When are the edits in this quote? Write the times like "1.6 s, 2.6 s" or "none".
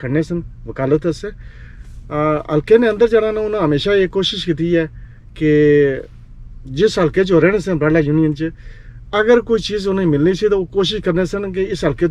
none